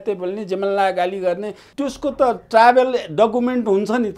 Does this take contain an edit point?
yes; 1 cut; at 1.7 s

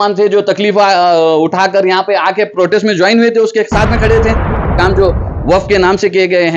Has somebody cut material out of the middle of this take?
yes; 1 cut; at 4.8 s

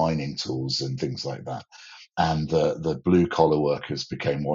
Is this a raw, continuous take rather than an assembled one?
yes; 0 cuts

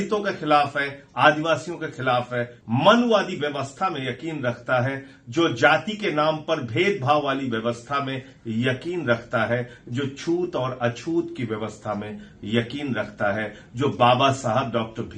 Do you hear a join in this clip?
yes; 1 cut; at 2.5 s

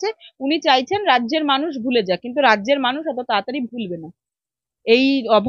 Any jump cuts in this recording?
no; 0 cuts

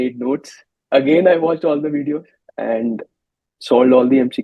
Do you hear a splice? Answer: yes; 1 cut; at 2.4 s

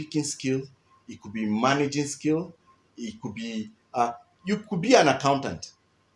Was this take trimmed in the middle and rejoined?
no; 0 cuts

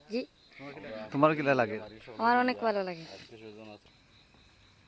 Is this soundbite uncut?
no; 1 cut; at 3.9 s

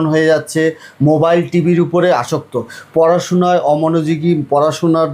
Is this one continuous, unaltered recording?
yes; 0 cuts

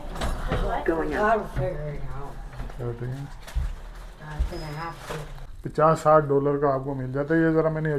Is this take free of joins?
no; 1 cut; at 5.4 s

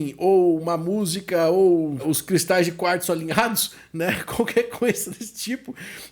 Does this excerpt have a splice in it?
yes; 1 cut; at 2.0 s

